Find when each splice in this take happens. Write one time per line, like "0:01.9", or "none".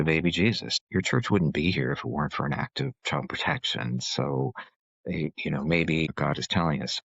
0:00.8
0:06.1

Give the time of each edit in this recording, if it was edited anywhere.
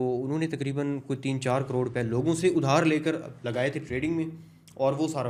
none

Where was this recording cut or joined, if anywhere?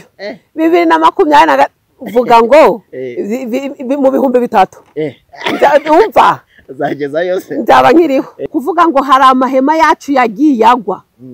0:08.5

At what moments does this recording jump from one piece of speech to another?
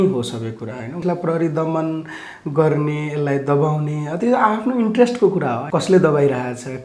0:01.0
0:05.6

